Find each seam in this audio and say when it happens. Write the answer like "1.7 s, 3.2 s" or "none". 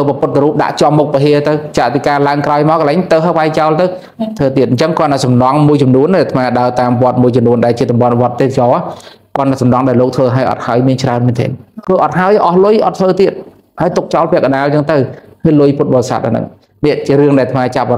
11.7 s